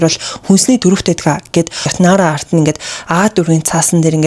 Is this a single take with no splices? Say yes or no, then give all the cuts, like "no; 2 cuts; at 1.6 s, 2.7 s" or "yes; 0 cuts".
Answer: no; 1 cut; at 1.8 s